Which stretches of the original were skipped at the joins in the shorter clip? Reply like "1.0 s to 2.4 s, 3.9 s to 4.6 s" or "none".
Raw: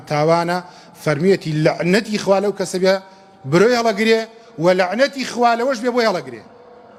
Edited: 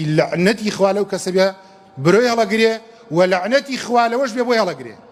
none